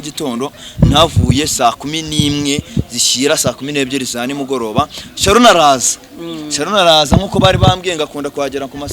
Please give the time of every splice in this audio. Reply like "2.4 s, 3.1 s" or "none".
none